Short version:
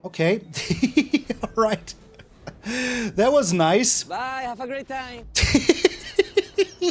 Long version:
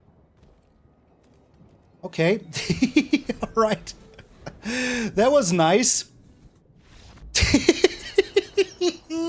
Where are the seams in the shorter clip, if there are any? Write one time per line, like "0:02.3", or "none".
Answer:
none